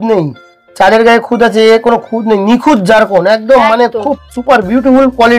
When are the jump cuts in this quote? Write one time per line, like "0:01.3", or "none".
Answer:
none